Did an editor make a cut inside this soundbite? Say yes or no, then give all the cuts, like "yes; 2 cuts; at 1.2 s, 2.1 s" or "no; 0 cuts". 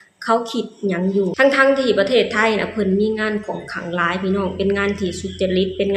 yes; 1 cut; at 1.3 s